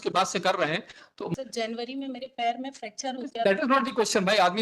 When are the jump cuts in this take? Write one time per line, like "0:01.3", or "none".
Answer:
0:01.2